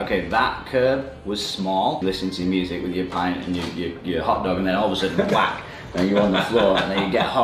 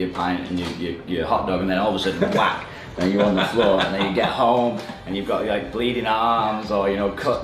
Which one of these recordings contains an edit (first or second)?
first